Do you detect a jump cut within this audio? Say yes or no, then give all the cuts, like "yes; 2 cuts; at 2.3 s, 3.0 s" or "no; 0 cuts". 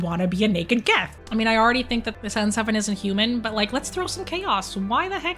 yes; 1 cut; at 1.1 s